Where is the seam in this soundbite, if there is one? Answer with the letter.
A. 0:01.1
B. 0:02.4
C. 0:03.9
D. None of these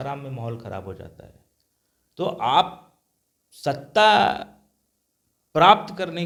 D